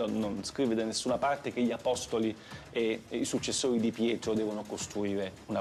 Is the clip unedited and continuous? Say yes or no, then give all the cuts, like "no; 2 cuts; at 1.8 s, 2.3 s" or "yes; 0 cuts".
yes; 0 cuts